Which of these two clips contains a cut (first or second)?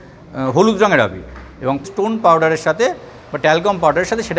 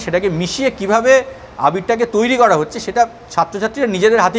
first